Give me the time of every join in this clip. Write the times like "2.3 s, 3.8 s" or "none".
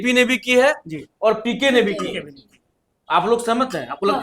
none